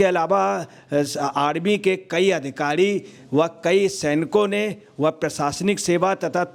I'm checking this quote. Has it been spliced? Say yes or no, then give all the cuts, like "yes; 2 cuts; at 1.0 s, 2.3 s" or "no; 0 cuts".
no; 0 cuts